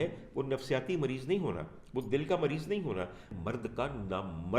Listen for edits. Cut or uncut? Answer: cut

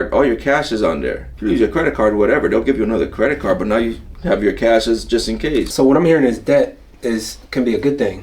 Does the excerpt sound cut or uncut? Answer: cut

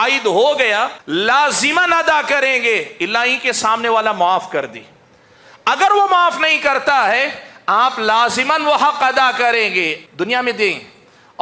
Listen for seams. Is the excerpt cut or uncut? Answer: cut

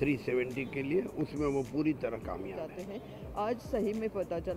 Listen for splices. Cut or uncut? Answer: cut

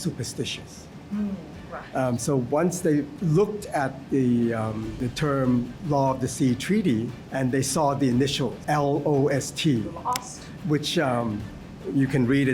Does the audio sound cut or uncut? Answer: cut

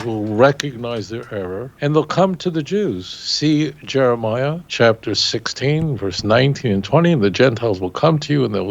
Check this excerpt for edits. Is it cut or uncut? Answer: cut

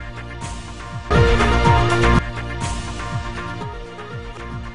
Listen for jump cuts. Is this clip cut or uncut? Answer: uncut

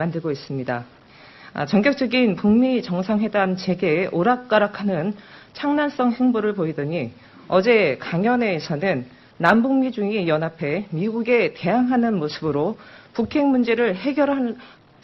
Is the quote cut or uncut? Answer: cut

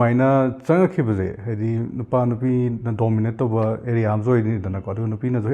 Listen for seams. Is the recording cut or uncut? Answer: uncut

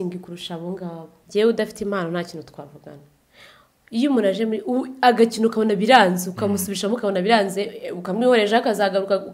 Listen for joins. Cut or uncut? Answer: cut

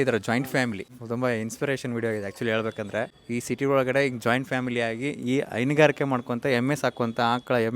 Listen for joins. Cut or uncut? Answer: cut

